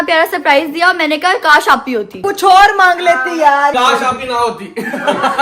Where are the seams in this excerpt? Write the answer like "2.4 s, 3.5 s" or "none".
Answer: 2.2 s, 3.7 s